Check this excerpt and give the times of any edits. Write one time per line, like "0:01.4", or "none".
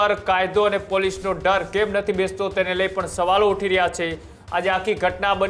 none